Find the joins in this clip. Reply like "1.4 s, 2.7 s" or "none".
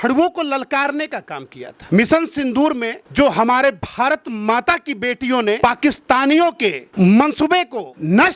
none